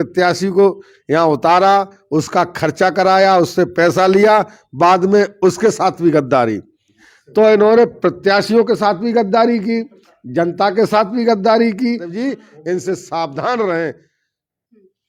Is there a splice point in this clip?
no; 0 cuts

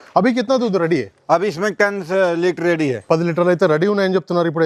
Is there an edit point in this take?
no; 0 cuts

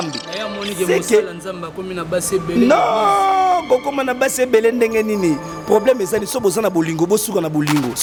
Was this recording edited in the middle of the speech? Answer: no; 0 cuts

